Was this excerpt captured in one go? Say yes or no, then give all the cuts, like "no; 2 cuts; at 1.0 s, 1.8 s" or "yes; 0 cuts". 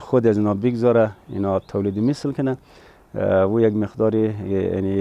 yes; 0 cuts